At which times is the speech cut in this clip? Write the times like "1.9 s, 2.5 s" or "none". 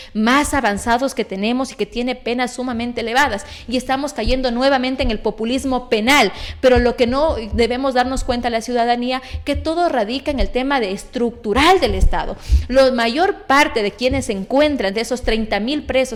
none